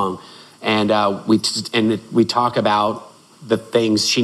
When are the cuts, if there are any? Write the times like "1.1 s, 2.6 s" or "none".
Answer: none